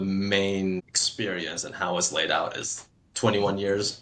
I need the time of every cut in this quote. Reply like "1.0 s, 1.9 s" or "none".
none